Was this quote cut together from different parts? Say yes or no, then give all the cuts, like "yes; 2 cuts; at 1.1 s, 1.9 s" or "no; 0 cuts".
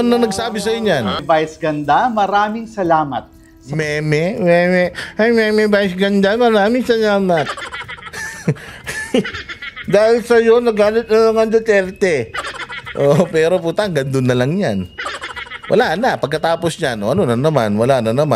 yes; 1 cut; at 1.2 s